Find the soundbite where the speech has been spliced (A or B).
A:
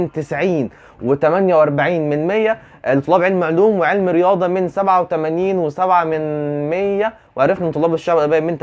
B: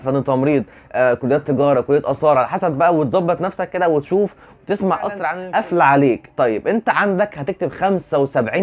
B